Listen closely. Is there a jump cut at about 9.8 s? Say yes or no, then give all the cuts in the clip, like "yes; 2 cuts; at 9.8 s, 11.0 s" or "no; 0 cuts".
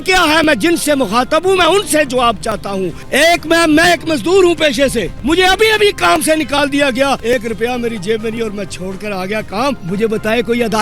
yes; 4 cuts; at 3.0 s, 5.1 s, 7.2 s, 9.8 s